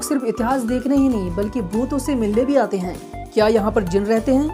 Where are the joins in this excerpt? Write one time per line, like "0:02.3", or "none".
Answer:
none